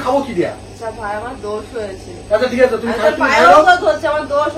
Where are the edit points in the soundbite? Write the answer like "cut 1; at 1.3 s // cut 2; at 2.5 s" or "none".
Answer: none